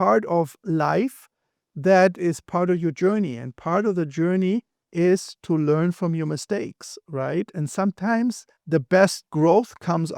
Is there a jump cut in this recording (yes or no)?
yes